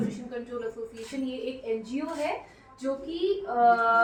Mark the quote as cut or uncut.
uncut